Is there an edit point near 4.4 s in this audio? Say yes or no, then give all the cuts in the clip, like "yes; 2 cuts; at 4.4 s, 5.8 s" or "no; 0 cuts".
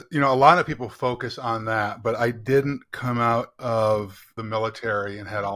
yes; 1 cut; at 4.4 s